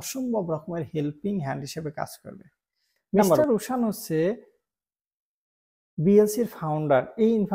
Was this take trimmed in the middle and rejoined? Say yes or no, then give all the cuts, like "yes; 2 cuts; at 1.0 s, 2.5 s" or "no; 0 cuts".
yes; 1 cut; at 3.4 s